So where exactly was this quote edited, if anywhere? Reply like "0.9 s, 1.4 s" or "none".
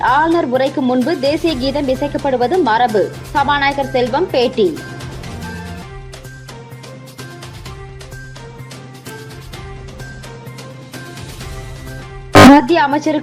none